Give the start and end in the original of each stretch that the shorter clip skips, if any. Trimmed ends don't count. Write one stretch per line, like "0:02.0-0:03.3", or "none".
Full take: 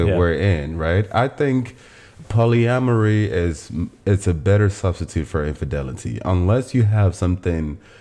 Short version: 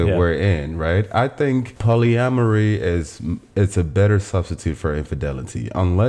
0:01.7-0:02.2